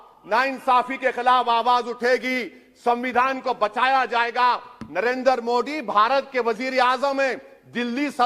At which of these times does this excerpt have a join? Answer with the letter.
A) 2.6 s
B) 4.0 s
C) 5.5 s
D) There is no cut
D